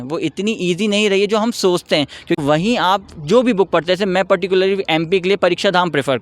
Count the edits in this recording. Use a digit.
1